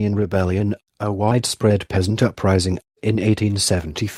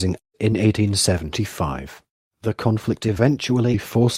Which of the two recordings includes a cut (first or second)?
second